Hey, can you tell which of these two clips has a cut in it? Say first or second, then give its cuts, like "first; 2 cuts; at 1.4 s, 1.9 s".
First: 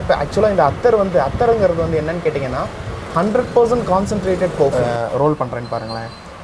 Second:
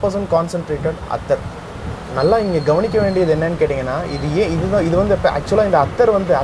first; 1 cut; at 4.7 s